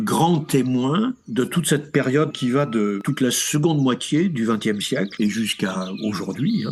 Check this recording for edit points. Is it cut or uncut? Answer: uncut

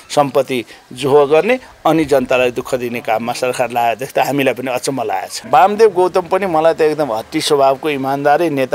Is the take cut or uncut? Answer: cut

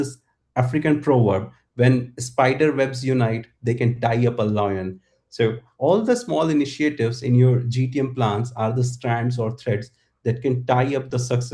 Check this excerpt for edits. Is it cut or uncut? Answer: uncut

